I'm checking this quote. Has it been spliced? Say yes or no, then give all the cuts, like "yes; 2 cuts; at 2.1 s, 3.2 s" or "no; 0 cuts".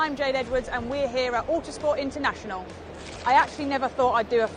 yes; 1 cut; at 3.1 s